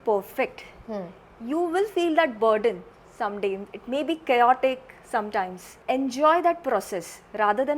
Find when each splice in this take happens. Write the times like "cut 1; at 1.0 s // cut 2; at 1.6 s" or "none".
cut 1; at 5.8 s